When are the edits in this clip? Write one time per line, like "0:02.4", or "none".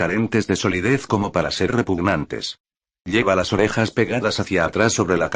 0:01.1